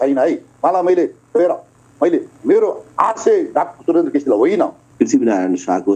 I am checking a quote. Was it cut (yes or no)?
yes